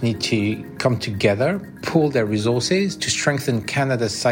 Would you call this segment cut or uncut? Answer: uncut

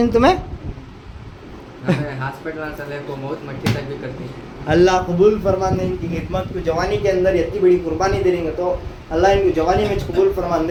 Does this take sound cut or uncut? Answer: uncut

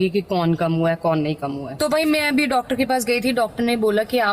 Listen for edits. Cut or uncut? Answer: cut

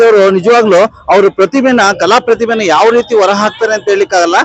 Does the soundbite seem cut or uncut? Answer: uncut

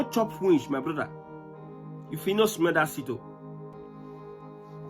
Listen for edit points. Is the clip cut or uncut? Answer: cut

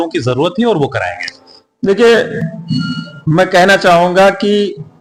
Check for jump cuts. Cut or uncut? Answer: uncut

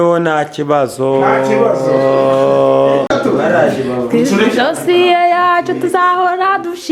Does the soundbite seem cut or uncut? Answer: cut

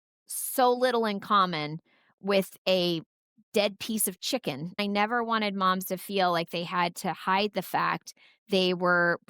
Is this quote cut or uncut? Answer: cut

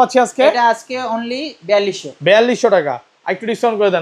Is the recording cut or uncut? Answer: uncut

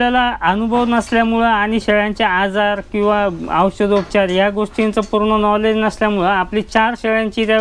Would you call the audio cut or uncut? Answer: uncut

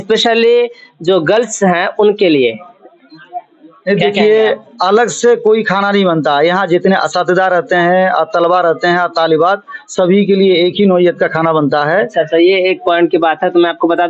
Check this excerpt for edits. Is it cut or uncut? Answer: uncut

